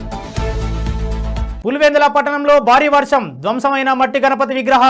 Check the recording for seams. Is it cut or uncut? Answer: uncut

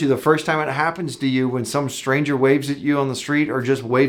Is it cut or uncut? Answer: uncut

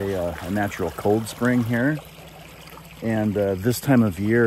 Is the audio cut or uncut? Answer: uncut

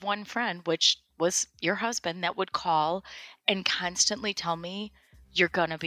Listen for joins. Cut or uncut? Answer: uncut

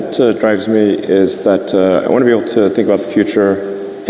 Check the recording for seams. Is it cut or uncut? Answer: uncut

